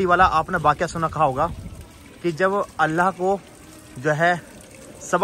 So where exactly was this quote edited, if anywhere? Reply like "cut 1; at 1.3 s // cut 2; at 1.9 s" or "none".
none